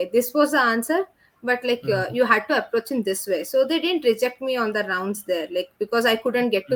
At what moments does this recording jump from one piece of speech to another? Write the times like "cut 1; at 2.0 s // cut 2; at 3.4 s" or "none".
none